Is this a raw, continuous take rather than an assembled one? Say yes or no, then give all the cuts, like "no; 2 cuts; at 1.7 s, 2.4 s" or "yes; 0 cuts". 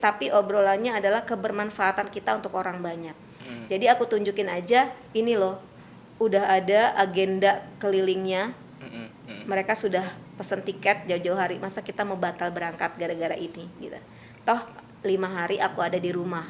yes; 0 cuts